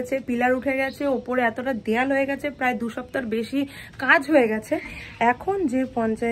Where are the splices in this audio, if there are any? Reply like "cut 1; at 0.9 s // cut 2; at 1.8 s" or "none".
none